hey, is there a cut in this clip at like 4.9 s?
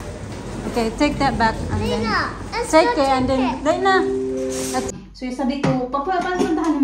yes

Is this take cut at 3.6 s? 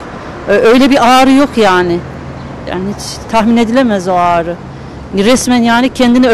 no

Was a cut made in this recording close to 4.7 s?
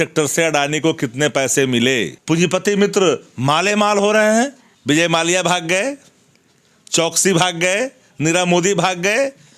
yes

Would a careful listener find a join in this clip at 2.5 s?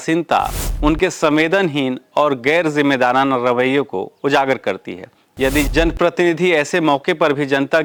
no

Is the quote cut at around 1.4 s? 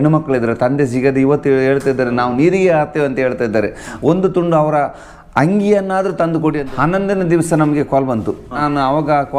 no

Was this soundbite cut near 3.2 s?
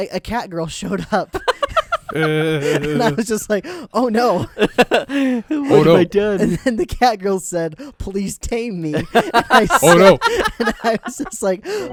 no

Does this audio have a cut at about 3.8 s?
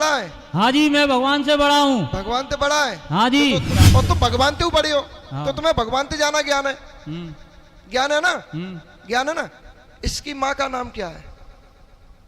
yes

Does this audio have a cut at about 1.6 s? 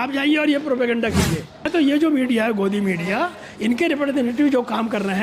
yes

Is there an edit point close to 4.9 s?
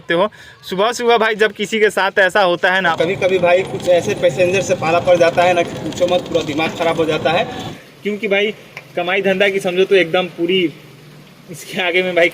no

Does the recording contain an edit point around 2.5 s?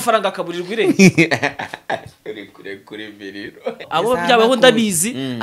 no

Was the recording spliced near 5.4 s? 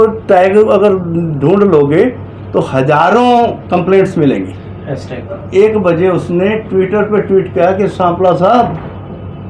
yes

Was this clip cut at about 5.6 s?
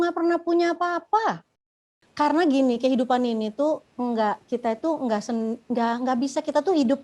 no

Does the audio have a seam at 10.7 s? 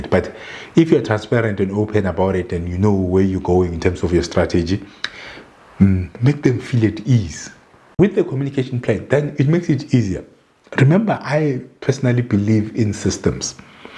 no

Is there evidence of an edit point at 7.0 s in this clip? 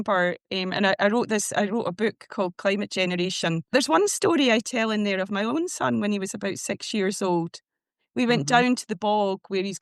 no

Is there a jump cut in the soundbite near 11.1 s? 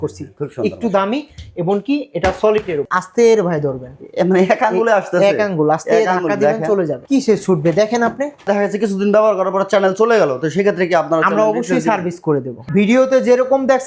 no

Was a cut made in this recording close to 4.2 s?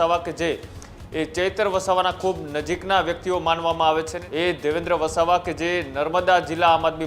yes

